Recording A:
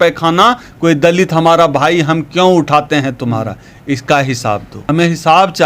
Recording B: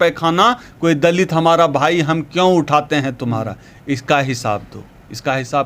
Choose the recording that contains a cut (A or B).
A